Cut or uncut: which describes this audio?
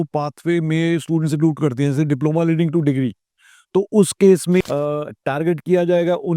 cut